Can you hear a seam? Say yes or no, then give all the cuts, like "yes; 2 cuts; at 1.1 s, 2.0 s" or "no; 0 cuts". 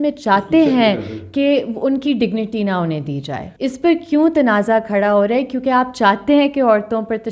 yes; 1 cut; at 3.4 s